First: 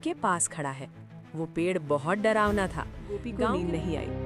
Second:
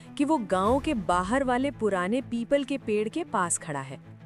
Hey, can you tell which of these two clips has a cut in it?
first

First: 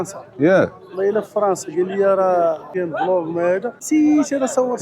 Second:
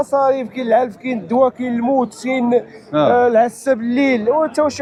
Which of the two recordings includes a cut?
first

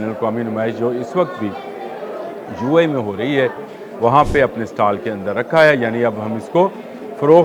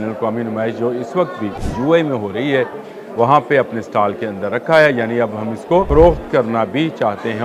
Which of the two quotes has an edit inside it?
second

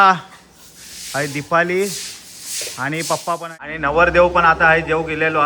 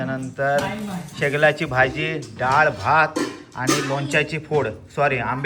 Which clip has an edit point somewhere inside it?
first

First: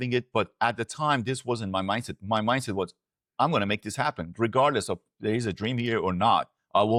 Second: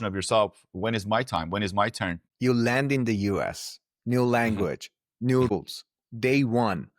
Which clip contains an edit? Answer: second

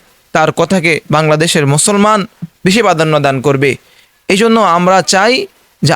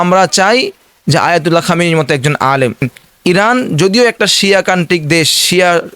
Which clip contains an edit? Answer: second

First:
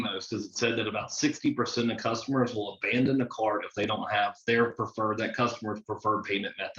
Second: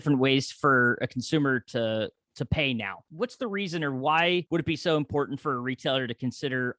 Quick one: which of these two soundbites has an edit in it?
second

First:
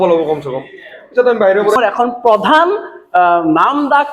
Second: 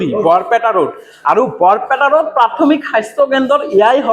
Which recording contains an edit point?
first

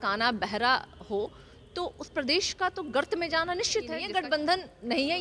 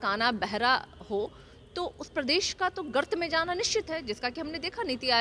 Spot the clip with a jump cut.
first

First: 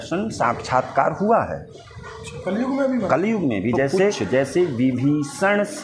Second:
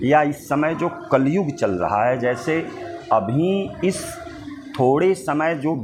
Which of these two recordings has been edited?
first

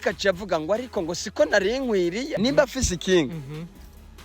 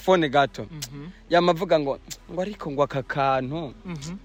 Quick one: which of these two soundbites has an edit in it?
first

